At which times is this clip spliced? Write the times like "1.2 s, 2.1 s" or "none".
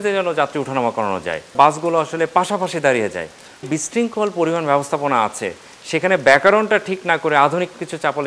1.5 s, 3.7 s